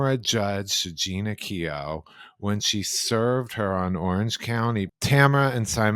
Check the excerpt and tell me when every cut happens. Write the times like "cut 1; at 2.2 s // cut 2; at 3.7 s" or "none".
cut 1; at 4.9 s